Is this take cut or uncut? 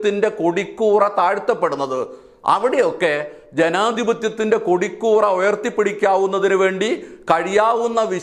uncut